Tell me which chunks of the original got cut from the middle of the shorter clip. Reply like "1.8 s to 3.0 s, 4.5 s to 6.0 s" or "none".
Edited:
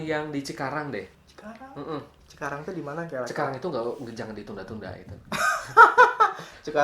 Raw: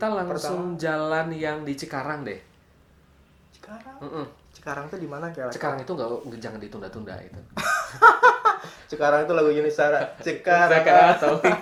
2.6 s to 3.5 s